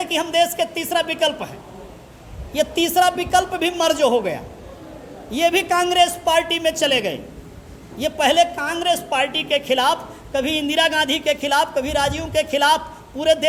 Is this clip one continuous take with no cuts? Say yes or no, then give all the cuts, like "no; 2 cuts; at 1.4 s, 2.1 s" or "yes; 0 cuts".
yes; 0 cuts